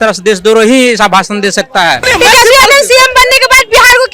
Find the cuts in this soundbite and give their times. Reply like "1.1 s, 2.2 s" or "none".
2.0 s